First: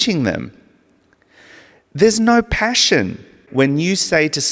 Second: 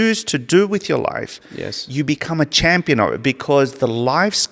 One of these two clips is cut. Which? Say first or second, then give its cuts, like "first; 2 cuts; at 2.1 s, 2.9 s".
first; 1 cut; at 3.4 s